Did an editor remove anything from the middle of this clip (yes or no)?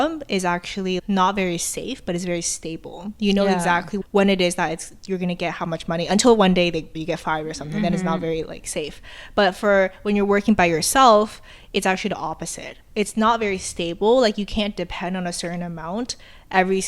yes